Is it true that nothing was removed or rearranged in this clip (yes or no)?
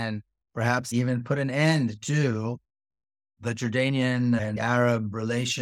no